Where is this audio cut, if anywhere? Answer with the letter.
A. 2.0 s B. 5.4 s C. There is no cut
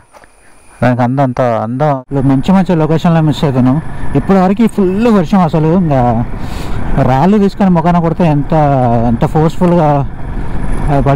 A